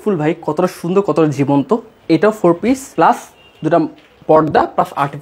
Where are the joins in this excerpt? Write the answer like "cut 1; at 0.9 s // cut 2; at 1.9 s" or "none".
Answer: cut 1; at 2.9 s